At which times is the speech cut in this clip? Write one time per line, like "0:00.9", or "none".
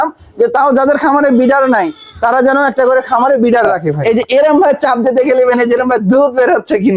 0:04.0